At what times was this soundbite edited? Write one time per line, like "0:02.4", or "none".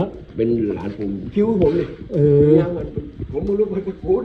none